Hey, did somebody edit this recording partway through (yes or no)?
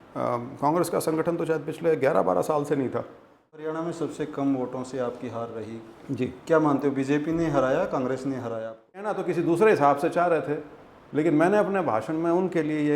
yes